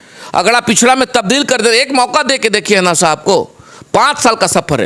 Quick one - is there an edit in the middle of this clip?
no; 0 cuts

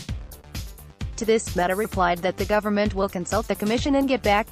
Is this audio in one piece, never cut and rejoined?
no; 1 cut; at 1.1 s

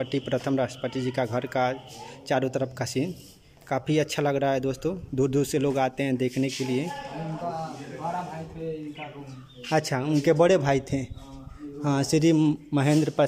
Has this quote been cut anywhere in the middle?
no; 0 cuts

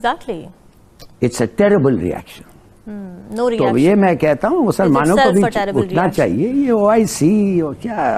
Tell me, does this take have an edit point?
no; 0 cuts

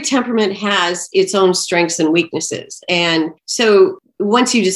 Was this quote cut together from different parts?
yes; 2 cuts; at 3.4 s, 4.0 s

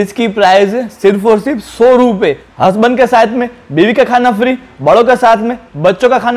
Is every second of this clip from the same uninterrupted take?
no; 1 cut; at 2.5 s

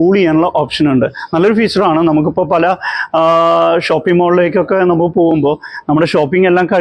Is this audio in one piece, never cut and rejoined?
yes; 0 cuts

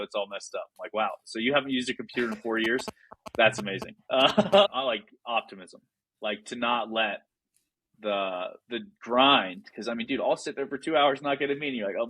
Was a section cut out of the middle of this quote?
yes; 1 cut; at 4.7 s

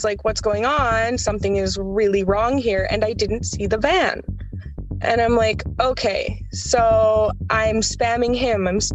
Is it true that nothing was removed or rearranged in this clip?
yes; 0 cuts

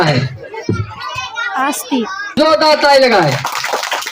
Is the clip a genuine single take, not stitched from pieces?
no; 1 cut; at 2.3 s

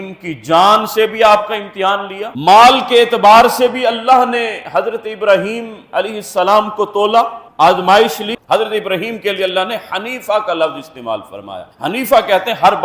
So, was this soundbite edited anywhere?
yes; 2 cuts; at 2.2 s, 8.3 s

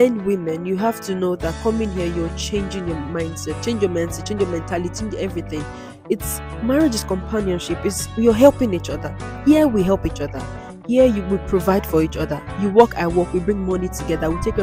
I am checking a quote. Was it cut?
no; 0 cuts

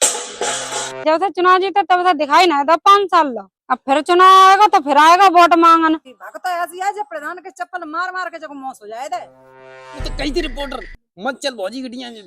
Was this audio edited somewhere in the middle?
yes; 2 cuts; at 1.0 s, 6.2 s

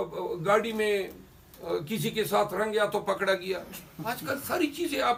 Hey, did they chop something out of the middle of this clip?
no; 0 cuts

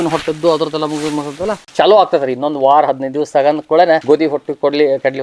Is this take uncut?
no; 2 cuts; at 1.6 s, 4.0 s

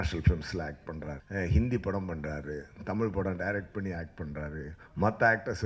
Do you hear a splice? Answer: yes; 1 cut; at 1.2 s

